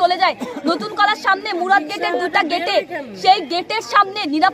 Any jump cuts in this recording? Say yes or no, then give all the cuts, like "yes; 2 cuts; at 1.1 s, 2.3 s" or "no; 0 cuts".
no; 0 cuts